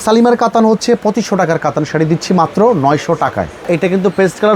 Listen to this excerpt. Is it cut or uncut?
cut